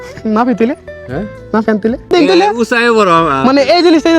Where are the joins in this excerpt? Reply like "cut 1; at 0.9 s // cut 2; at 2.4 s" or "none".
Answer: cut 1; at 2.1 s